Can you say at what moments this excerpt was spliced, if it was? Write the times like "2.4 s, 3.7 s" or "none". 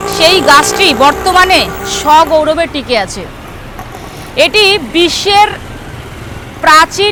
none